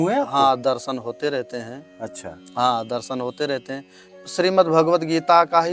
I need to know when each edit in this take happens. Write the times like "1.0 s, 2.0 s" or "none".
4.1 s